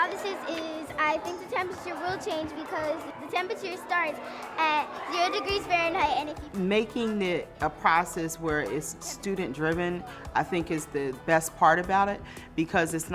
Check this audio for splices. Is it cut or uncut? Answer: cut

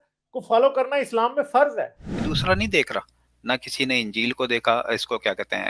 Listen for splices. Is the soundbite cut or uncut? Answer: cut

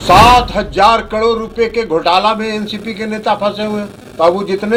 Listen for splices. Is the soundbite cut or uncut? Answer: uncut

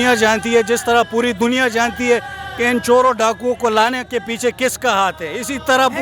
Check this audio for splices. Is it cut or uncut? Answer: uncut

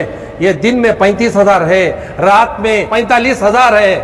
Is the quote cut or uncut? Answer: cut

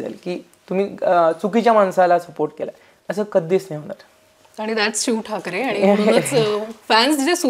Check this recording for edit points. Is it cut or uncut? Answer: uncut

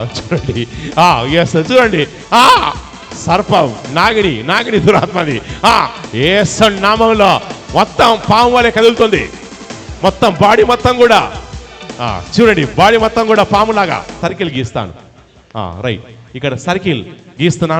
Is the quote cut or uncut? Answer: cut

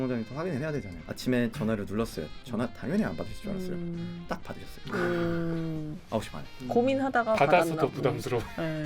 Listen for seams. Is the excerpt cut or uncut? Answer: cut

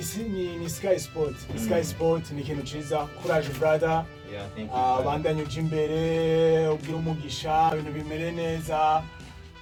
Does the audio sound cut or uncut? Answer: uncut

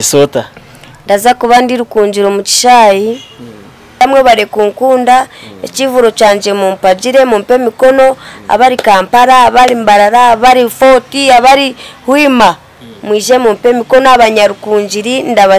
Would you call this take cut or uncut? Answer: cut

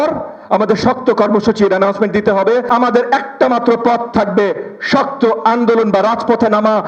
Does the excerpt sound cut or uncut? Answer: cut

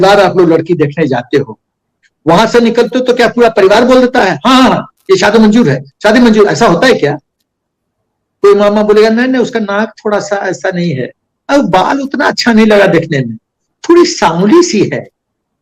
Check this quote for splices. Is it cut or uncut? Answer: uncut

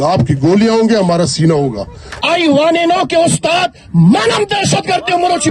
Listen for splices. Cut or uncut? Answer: cut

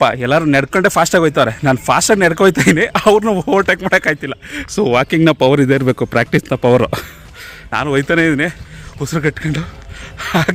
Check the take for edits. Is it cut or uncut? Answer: uncut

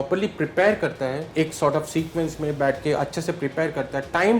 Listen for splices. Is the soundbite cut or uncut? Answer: cut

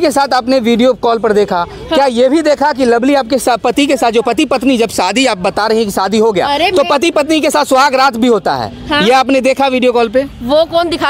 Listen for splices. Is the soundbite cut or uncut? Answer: uncut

